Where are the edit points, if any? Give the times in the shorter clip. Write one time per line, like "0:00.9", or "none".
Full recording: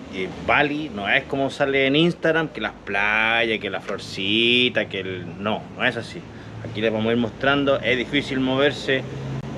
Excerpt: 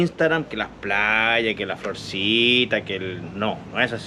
none